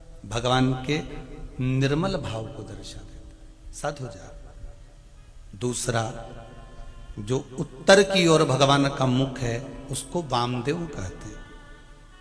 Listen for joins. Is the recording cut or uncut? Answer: uncut